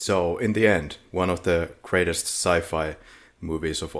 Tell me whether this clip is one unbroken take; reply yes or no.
yes